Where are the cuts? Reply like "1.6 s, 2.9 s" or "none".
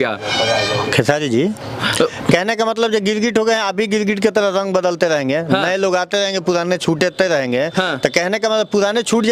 none